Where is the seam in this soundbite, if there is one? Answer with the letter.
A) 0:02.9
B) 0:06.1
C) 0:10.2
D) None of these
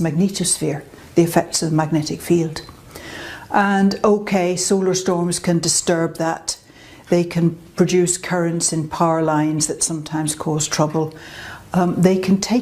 C